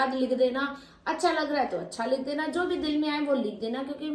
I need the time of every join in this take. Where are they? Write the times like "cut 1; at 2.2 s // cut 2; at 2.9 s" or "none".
none